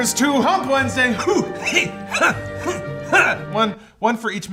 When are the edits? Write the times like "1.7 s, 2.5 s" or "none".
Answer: none